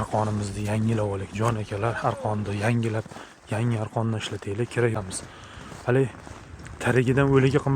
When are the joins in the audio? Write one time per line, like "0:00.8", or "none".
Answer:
0:05.0